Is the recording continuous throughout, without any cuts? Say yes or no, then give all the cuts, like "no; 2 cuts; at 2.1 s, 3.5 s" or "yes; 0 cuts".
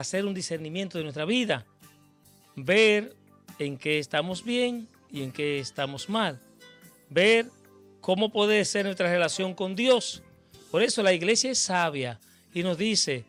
yes; 0 cuts